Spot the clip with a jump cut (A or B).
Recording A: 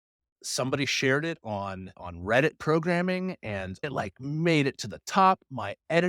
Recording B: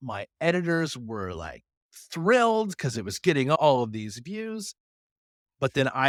A